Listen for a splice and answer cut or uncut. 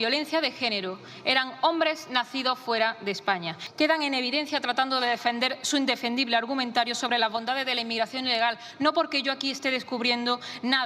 cut